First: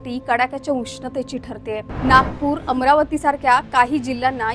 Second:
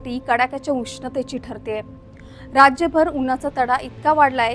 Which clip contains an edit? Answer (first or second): second